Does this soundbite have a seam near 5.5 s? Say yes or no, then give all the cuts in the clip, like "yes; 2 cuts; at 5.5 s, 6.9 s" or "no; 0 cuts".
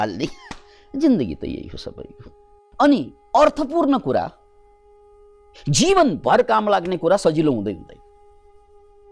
no; 1 cut; at 2.7 s